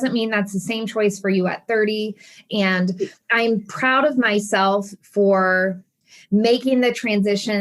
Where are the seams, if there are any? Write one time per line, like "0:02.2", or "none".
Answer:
0:02.3